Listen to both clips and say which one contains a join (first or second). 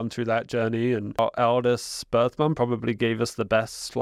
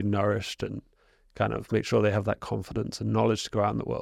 first